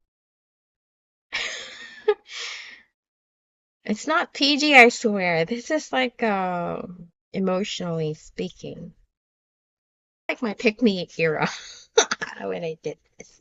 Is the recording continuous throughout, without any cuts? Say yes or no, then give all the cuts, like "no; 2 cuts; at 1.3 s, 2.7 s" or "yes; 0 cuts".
no; 1 cut; at 10.3 s